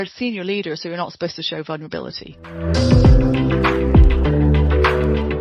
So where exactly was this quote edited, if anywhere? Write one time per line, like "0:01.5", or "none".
0:02.4